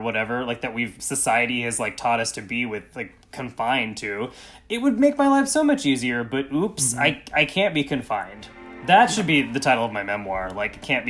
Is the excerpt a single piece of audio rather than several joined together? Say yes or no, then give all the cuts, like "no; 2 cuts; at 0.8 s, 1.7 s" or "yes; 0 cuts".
no; 1 cut; at 1.0 s